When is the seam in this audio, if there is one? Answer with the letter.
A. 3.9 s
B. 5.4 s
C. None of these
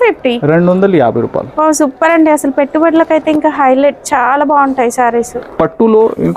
B